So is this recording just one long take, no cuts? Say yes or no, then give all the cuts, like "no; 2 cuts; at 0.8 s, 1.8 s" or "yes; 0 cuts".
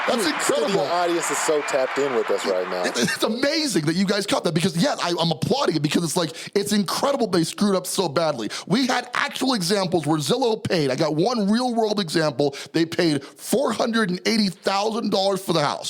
yes; 0 cuts